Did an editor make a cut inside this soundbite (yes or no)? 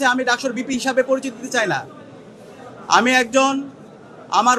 no